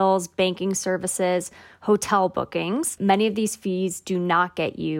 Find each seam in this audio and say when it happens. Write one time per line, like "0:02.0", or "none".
0:02.9